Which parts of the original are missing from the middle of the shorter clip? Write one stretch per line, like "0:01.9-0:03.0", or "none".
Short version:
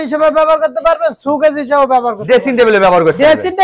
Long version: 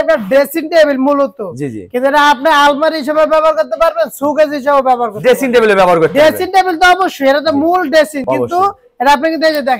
none